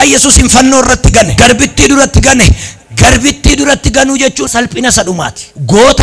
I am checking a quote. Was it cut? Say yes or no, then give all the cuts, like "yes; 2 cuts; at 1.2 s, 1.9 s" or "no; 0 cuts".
yes; 1 cut; at 1.3 s